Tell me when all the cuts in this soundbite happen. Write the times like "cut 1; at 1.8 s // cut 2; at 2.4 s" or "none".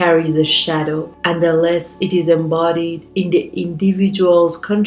cut 1; at 1.1 s

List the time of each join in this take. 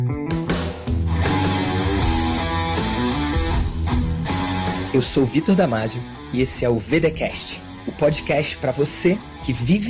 none

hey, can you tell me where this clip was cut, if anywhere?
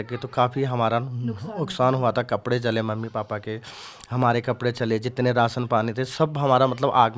none

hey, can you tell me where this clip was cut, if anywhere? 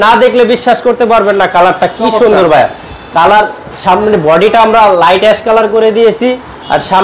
none

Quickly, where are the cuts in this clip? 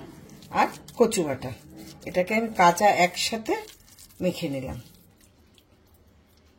none

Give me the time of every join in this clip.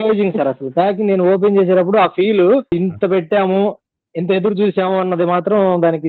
none

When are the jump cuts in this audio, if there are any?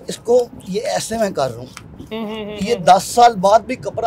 none

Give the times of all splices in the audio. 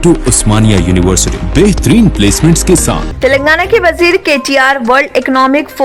cut 1; at 3.1 s

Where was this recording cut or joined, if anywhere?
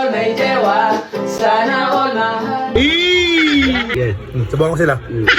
cut 1; at 3.9 s

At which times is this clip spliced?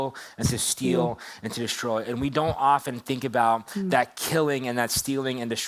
none

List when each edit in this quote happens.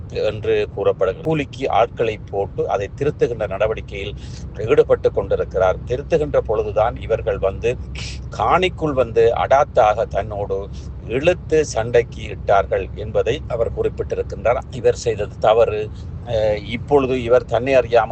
cut 1; at 1.3 s // cut 2; at 14.6 s

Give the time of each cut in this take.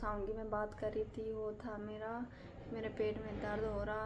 none

